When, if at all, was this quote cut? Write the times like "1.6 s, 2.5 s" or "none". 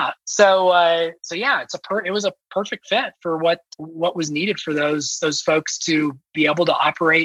3.7 s